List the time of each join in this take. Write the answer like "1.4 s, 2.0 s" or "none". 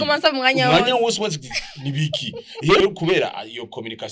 2.8 s